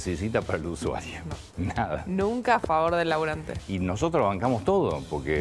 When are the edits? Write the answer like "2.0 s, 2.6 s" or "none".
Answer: 3.6 s